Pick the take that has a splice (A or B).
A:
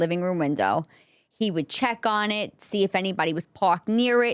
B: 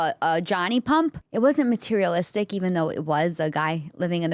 B